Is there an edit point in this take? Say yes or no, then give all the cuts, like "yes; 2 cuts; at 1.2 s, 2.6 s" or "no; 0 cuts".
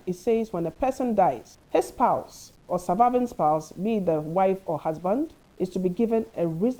yes; 2 cuts; at 1.5 s, 5.4 s